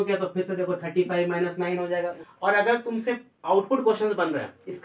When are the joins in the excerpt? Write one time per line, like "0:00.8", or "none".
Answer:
0:02.2

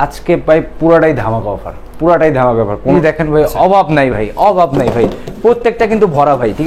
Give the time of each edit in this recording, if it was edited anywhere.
0:02.9

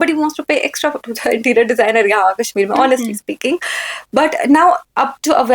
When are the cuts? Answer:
none

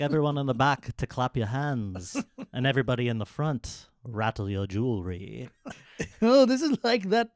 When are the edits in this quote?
0:05.5

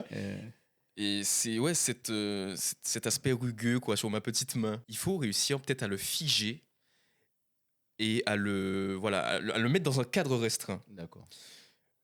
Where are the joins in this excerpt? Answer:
0:04.9

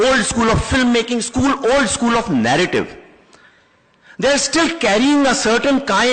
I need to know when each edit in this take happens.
0:00.9

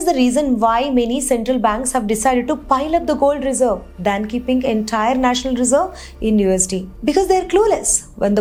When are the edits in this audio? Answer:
none

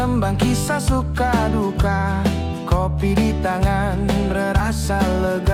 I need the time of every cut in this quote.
none

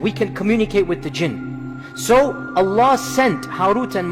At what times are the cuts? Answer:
none

